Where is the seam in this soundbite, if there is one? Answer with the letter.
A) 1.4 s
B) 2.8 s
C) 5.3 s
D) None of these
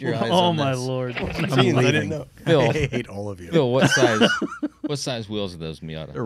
A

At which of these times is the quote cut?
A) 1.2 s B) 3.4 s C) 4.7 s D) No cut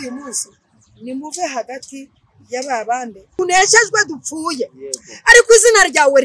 B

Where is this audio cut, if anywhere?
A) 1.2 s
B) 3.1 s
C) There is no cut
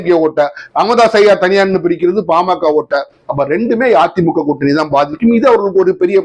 C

